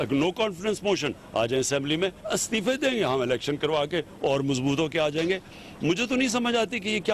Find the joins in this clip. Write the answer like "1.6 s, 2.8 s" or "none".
2.2 s